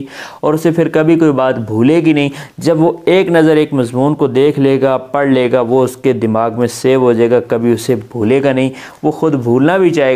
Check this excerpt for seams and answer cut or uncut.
uncut